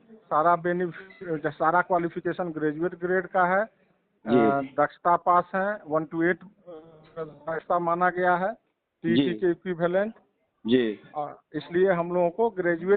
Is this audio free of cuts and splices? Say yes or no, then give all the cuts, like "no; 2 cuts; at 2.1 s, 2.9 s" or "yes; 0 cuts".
yes; 0 cuts